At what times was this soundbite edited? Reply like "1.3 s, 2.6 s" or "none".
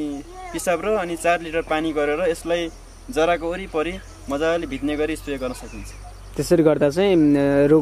none